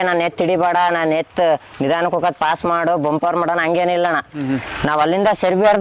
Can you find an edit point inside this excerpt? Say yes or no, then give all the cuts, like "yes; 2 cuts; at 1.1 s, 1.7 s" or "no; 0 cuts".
no; 0 cuts